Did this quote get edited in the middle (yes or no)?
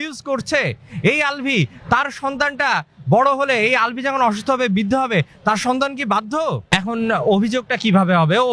yes